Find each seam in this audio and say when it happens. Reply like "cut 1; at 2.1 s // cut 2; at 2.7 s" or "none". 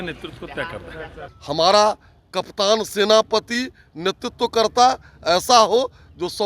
cut 1; at 1.3 s